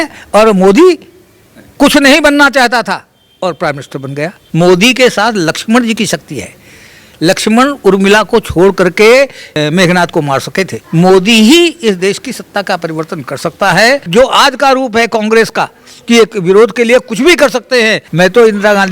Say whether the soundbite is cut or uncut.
cut